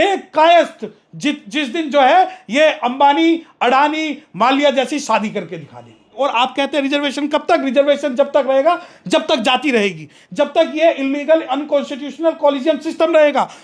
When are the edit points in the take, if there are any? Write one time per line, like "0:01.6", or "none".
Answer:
0:06.2